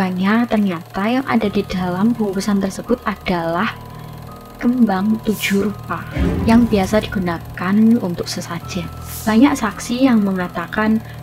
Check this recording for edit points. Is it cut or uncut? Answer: cut